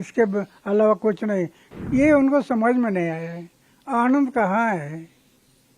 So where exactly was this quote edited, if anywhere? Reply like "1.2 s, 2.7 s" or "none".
1.6 s

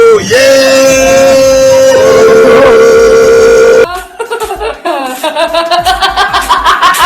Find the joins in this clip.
3.8 s

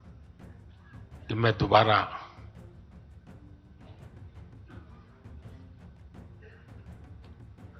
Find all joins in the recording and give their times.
1.3 s, 2.3 s

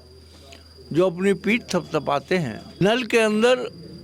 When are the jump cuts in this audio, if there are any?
2.8 s

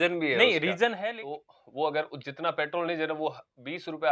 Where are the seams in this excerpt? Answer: 1.0 s

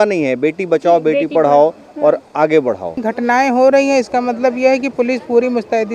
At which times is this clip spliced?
3.0 s

